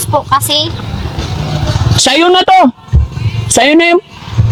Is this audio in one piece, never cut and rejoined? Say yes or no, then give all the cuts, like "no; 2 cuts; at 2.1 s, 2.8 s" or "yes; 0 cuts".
yes; 0 cuts